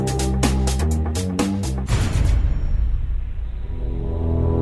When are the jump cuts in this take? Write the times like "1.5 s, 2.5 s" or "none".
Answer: 1.9 s